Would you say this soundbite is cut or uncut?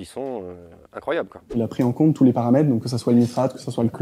cut